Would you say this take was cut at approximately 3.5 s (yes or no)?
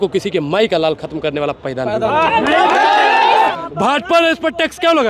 yes